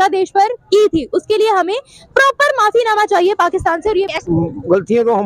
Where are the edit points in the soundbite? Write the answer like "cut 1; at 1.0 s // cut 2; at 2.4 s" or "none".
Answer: cut 1; at 4.1 s